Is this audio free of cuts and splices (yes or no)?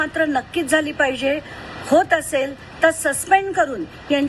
yes